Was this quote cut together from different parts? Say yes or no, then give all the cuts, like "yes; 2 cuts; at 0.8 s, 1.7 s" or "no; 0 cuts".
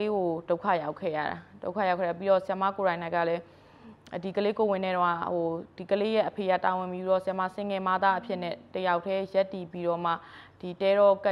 no; 0 cuts